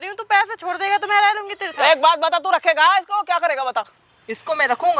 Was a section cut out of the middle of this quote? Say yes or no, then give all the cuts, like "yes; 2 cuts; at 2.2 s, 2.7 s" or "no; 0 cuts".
no; 0 cuts